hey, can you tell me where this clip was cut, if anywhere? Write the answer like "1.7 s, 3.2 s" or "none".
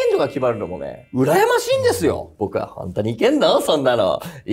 2.3 s